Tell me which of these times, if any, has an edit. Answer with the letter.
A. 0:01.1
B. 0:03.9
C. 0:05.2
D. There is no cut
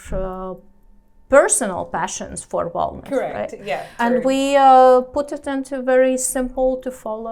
B